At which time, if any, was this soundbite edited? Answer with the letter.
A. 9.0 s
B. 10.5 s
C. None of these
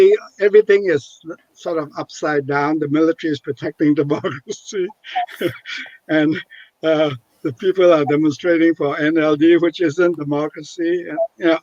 C